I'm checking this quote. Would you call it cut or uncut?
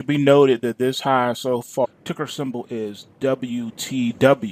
uncut